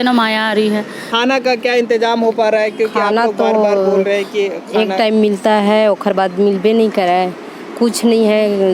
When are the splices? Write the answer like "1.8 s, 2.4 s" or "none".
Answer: 1.0 s